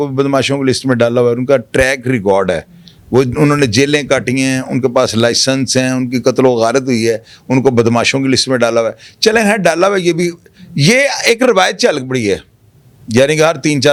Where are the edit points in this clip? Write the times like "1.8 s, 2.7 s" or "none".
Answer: none

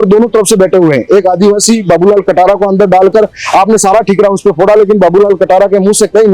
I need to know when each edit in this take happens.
none

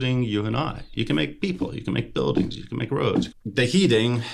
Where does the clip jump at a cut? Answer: 3.3 s

